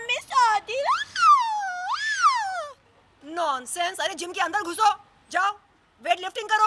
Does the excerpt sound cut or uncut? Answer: cut